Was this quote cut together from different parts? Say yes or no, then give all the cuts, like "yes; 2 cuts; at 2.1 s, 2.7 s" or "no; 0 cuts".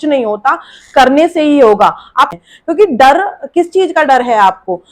yes; 1 cut; at 2.4 s